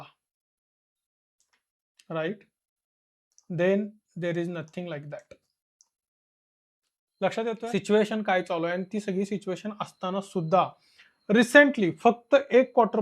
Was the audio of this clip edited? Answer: yes; 1 cut; at 7.6 s

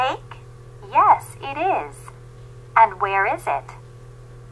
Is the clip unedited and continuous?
no; 1 cut; at 1.4 s

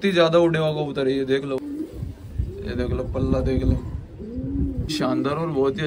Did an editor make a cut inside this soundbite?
yes; 2 cuts; at 1.6 s, 4.9 s

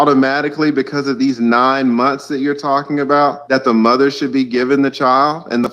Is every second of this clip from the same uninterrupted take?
no; 1 cut; at 3.4 s

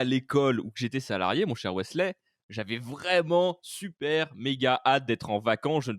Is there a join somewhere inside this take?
no; 0 cuts

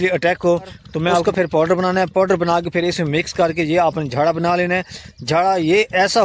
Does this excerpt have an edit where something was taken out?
yes; 1 cut; at 1.2 s

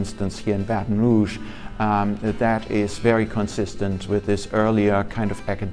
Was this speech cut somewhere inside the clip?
no; 0 cuts

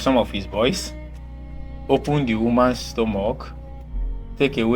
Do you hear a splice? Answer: no; 0 cuts

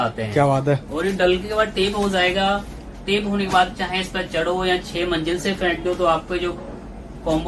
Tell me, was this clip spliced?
no; 0 cuts

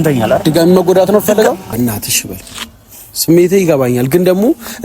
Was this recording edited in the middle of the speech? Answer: yes; 1 cut; at 1.7 s

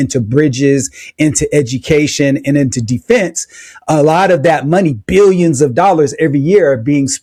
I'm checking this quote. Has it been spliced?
no; 0 cuts

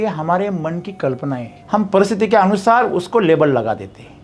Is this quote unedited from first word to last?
no; 1 cut; at 1.5 s

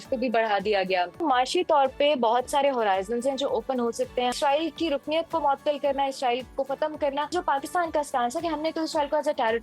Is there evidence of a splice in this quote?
yes; 3 cuts; at 1.2 s, 4.3 s, 7.3 s

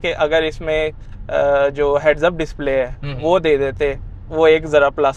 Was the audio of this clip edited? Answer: no; 0 cuts

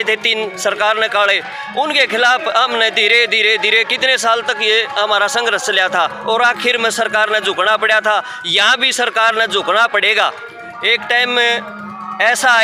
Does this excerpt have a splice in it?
no; 0 cuts

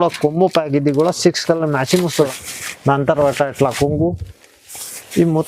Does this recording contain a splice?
yes; 1 cut; at 2.3 s

